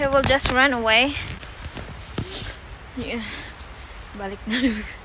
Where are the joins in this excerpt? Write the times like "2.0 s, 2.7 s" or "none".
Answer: 1.4 s